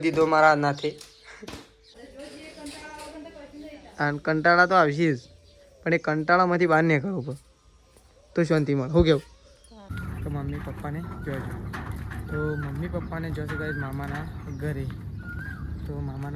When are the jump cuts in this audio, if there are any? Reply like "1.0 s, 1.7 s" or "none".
2.0 s, 9.9 s